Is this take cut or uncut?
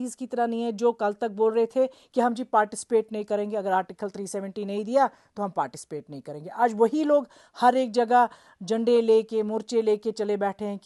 uncut